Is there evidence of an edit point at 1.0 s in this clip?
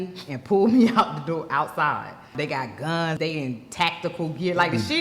no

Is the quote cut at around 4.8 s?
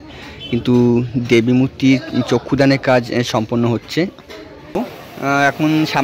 yes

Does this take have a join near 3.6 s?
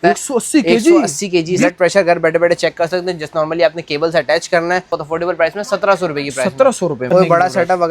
no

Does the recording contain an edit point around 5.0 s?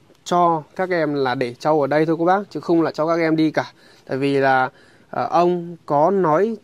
no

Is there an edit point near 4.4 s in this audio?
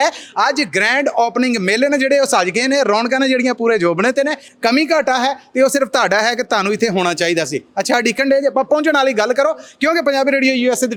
no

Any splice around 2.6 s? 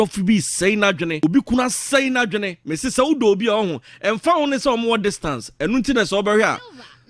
yes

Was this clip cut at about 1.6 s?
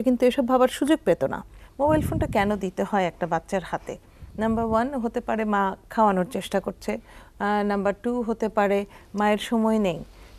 yes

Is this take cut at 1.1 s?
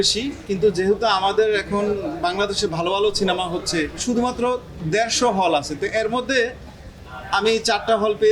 no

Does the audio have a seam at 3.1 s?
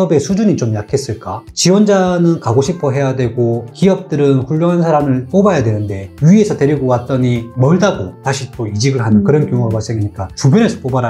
no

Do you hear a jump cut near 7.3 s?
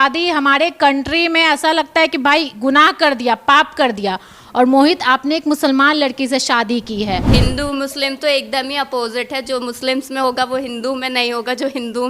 yes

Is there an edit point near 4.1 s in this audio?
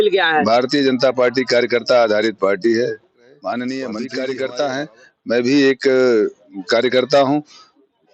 yes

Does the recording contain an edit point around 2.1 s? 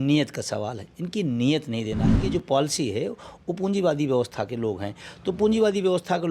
yes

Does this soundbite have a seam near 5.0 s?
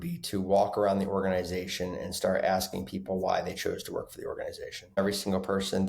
yes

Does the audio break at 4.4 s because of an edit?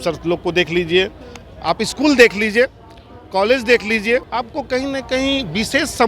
yes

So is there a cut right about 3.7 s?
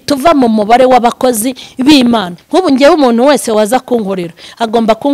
no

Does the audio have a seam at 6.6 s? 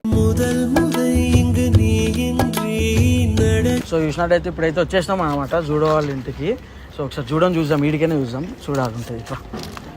no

